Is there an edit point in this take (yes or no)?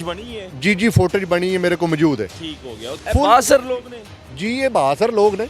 yes